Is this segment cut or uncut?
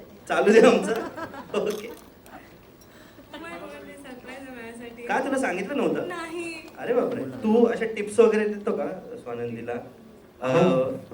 cut